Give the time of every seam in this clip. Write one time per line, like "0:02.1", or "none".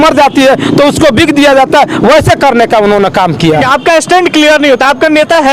0:03.6

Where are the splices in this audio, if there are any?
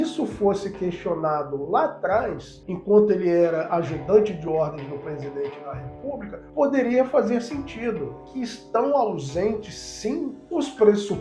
0:08.2

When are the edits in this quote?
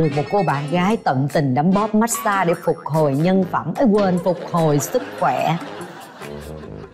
none

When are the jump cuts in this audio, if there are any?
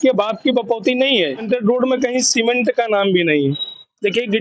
0:01.4

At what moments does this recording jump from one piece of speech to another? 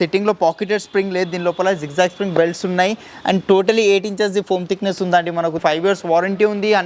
0:05.6

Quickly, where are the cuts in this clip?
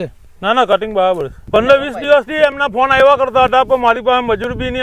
0:01.3

